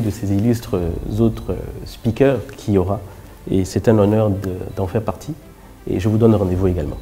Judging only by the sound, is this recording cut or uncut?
uncut